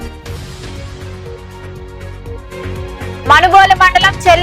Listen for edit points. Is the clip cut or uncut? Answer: uncut